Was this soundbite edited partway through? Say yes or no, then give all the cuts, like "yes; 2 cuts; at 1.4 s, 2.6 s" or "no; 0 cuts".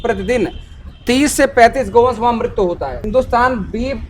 yes; 1 cut; at 3.1 s